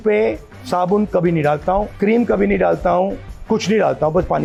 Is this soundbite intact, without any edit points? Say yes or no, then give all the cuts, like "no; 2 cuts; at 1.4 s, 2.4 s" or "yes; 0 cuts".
yes; 0 cuts